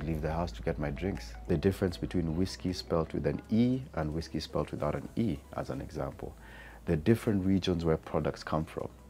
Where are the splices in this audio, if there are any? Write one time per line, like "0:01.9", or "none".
0:01.3